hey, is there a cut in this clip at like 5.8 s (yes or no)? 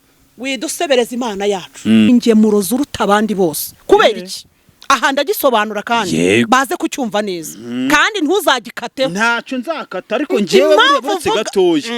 no